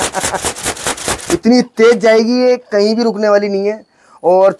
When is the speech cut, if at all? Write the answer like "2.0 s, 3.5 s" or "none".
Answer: none